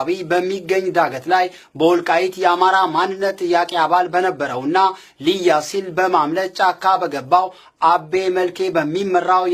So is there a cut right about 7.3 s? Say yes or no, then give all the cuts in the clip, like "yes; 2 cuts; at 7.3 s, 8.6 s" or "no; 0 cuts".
yes; 1 cut; at 7.3 s